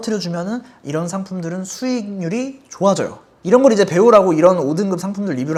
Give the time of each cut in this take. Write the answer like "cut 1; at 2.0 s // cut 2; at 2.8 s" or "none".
none